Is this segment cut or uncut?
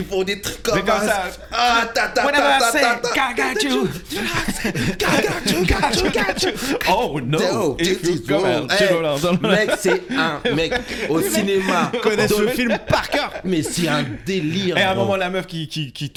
uncut